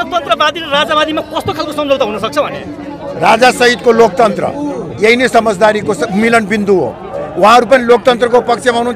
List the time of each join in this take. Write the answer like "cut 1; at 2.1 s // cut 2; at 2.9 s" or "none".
none